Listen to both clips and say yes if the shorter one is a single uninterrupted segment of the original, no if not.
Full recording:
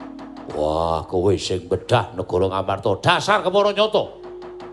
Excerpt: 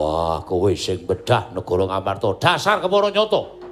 yes